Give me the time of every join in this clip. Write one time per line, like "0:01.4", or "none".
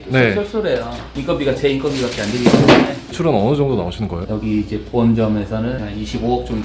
0:03.1
0:04.2
0:05.8